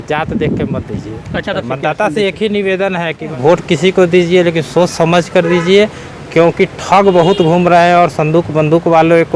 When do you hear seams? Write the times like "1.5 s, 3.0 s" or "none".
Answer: 1.6 s, 3.3 s